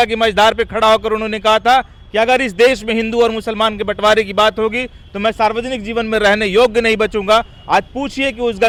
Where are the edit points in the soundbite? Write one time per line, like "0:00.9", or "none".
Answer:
none